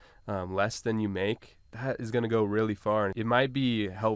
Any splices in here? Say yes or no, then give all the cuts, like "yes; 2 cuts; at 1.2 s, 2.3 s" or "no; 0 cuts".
yes; 1 cut; at 3.2 s